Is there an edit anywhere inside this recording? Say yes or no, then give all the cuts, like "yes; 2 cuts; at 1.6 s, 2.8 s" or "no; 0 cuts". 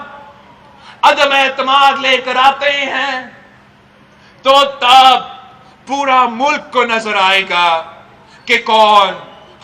no; 0 cuts